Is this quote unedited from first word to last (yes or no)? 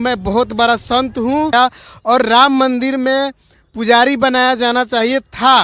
no